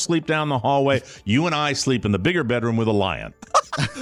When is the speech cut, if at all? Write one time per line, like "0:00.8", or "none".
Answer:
none